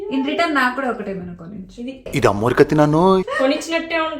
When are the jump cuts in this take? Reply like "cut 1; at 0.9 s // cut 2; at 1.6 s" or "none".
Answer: cut 1; at 3.3 s

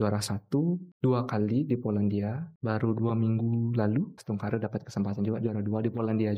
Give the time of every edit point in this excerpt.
cut 1; at 0.9 s // cut 2; at 2.5 s // cut 3; at 4.2 s

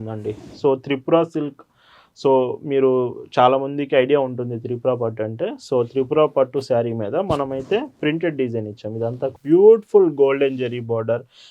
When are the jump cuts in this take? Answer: cut 1; at 9.4 s

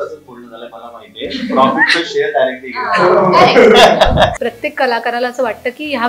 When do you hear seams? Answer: cut 1; at 4.4 s

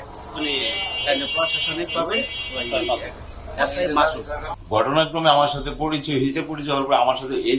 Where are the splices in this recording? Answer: cut 1; at 4.5 s

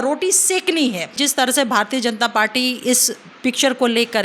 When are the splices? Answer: cut 1; at 1.1 s

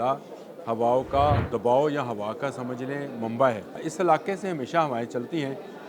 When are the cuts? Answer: cut 1; at 1.5 s // cut 2; at 3.9 s

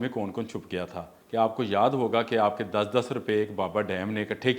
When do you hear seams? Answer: cut 1; at 1.1 s

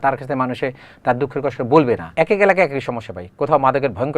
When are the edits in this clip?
cut 1; at 2.1 s

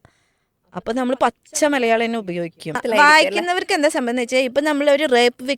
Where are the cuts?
cut 1; at 2.8 s

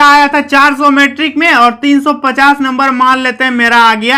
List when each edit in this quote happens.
none

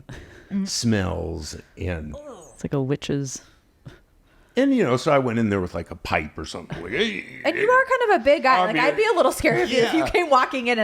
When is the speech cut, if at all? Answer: none

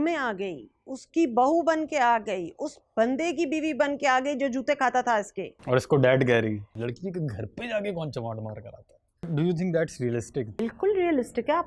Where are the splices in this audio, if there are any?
cut 1; at 6.6 s // cut 2; at 9.3 s // cut 3; at 10.6 s

